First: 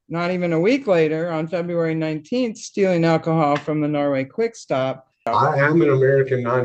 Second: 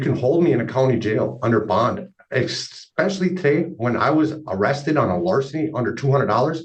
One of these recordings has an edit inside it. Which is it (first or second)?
first